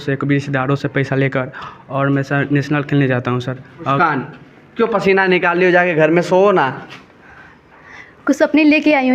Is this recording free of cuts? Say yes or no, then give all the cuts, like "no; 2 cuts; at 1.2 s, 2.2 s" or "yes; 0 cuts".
no; 1 cut; at 4.0 s